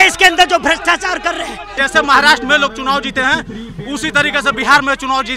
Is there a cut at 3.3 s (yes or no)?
no